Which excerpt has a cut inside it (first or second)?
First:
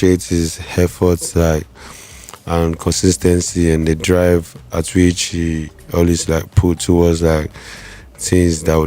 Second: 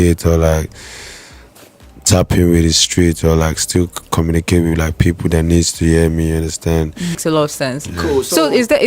second